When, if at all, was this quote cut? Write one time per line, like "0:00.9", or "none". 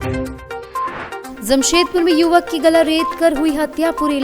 0:01.3